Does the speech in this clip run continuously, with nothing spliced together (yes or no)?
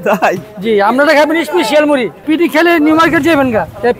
no